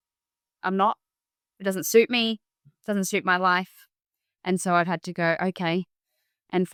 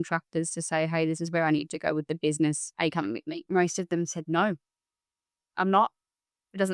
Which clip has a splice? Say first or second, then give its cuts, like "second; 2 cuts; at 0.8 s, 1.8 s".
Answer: second; 1 cut; at 3.1 s